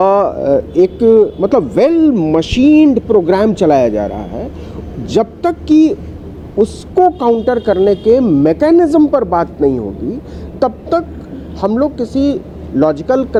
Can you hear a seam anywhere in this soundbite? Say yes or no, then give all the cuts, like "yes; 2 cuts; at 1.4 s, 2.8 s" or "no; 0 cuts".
no; 0 cuts